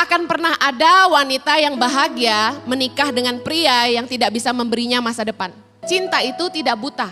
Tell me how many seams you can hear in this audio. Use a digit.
1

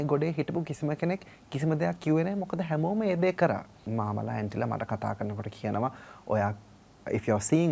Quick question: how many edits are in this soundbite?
1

